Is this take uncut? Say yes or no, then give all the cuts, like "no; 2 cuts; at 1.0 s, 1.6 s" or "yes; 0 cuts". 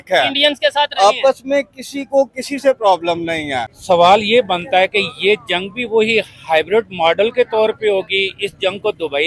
no; 1 cut; at 3.7 s